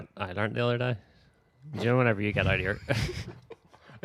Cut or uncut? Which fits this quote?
uncut